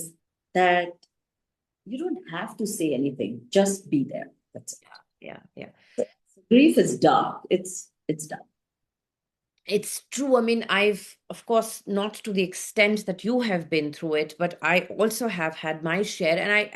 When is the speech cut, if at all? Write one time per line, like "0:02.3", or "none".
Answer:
none